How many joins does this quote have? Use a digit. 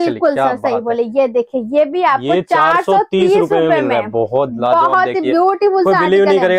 0